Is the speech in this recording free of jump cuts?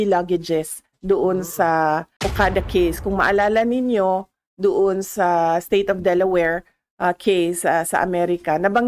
no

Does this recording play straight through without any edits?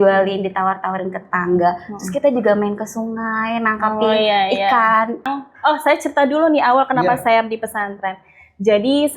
no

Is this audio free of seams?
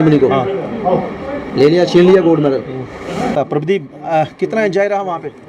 no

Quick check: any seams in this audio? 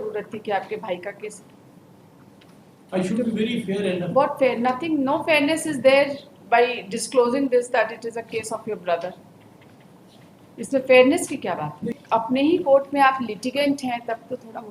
yes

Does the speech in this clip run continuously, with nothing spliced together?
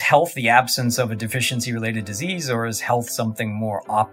yes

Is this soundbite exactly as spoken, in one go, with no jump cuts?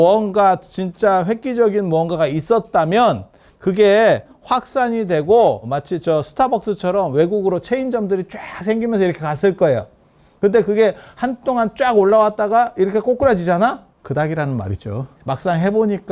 no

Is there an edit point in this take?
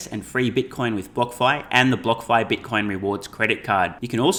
no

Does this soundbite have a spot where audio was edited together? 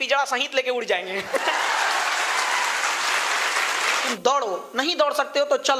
yes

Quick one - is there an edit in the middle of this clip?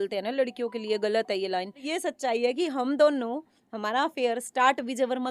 yes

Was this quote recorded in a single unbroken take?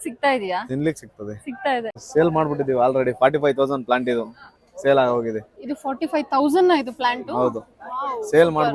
no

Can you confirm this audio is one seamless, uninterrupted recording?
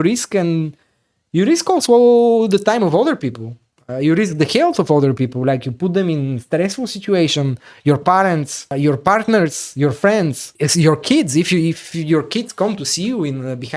no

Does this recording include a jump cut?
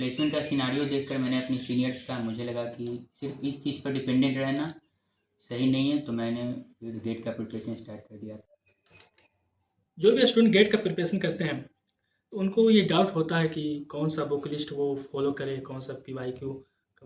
no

